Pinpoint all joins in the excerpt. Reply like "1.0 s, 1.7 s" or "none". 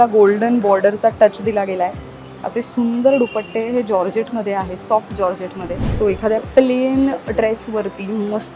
5.8 s